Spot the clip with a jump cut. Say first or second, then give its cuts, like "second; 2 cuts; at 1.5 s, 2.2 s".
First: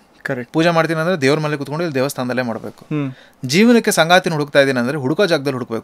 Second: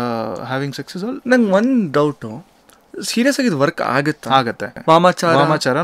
second; 1 cut; at 4.7 s